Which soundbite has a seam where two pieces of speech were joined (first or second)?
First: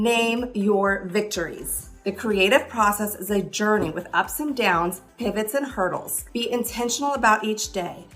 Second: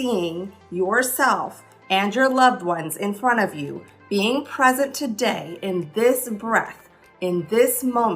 first